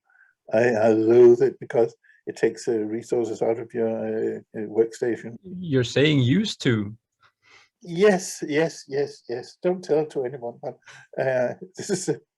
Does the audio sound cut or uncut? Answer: cut